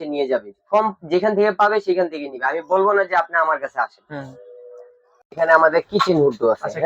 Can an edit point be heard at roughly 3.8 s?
no; 0 cuts

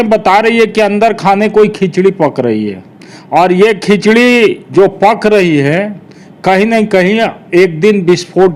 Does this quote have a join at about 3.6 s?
no; 0 cuts

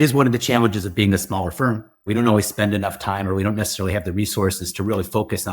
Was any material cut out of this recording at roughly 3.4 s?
no; 1 cut; at 2.1 s

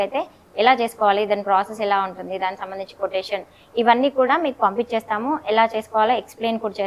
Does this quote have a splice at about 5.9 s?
no; 0 cuts

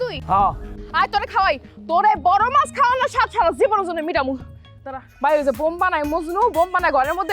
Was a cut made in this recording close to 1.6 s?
no; 1 cut; at 5.0 s

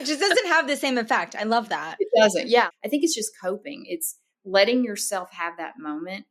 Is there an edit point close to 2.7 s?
yes; 1 cut; at 2.7 s

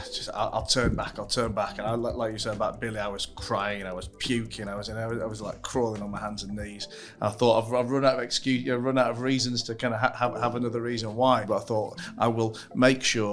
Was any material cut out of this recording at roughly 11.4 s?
yes; 1 cut; at 11.4 s

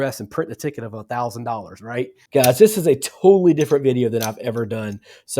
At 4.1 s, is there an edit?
no; 1 cut; at 2.2 s

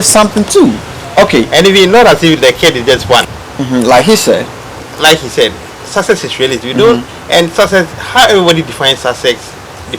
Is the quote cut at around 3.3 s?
yes; 2 cuts; at 1.0 s, 3.3 s

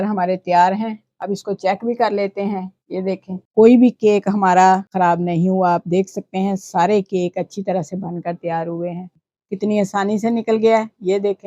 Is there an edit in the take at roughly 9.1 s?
yes; 3 cuts; at 3.4 s, 4.9 s, 9.1 s

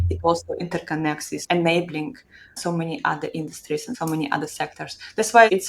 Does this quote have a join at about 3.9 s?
yes; 3 cuts; at 1.4 s, 2.6 s, 3.9 s

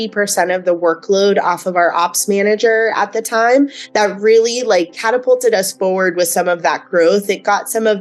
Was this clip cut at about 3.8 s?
yes; 1 cut; at 3.8 s

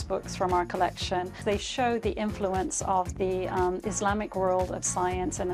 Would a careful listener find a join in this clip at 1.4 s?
yes; 1 cut; at 1.4 s

